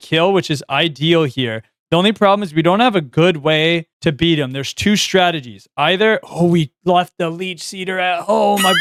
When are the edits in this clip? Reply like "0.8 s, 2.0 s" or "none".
none